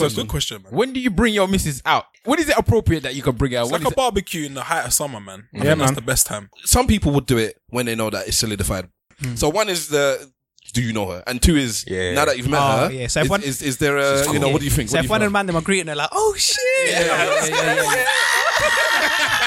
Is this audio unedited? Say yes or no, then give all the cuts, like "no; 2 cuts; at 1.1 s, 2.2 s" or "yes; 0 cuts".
no; 3 cuts; at 2.2 s, 6.6 s, 9.2 s